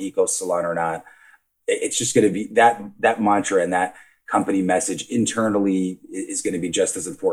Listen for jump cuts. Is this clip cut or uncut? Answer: cut